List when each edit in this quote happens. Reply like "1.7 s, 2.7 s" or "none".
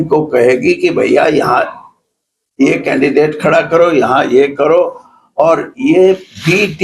none